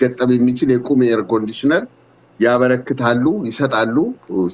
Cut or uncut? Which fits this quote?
uncut